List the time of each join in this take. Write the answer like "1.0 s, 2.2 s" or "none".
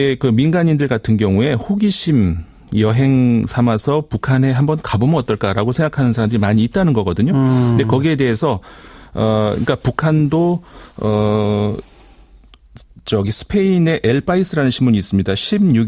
none